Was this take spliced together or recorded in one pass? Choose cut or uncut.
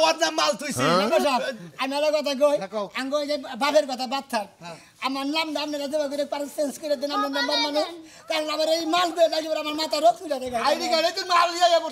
uncut